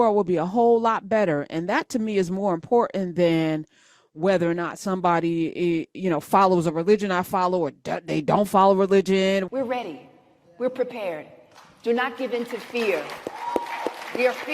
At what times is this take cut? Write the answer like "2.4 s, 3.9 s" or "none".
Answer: 9.5 s